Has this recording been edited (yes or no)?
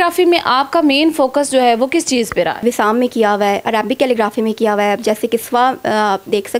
yes